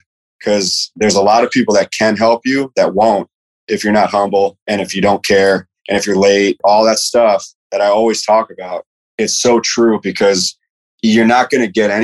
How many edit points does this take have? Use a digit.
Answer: 2